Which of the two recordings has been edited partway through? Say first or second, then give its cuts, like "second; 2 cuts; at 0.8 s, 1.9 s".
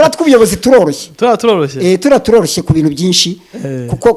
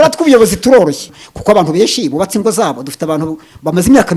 second; 1 cut; at 1.1 s